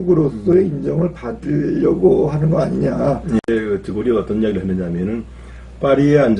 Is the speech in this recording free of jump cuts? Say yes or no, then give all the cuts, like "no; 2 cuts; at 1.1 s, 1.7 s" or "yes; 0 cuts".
no; 1 cut; at 3.5 s